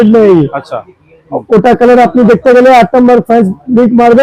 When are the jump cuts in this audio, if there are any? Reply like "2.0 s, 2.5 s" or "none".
none